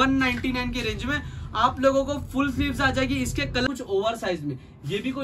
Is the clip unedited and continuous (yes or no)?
no